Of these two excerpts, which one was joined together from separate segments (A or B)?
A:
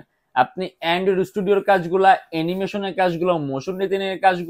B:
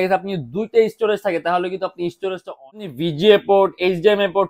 B